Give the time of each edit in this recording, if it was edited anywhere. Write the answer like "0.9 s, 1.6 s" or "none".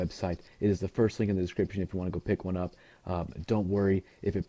none